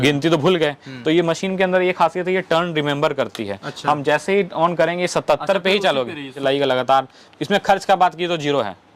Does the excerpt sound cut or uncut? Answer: cut